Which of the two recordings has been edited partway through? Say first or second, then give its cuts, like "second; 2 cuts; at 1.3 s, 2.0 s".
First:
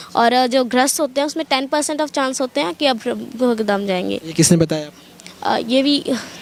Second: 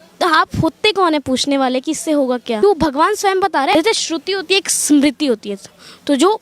second; 2 cuts; at 2.6 s, 3.7 s